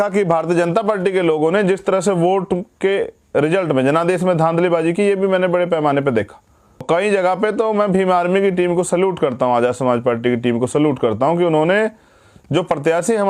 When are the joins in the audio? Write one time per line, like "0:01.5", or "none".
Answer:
0:06.8